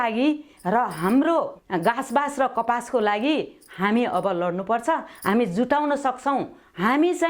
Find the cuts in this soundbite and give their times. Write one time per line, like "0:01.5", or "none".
0:01.6